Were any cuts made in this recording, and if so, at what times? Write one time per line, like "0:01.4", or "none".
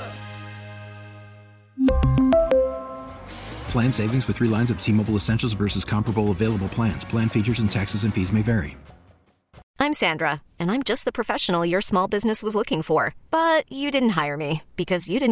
0:09.6